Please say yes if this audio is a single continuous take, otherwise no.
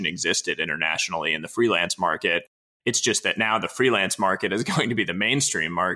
yes